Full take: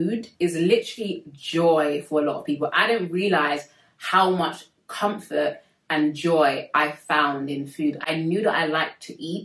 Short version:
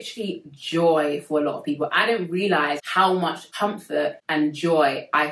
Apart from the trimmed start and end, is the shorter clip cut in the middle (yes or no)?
yes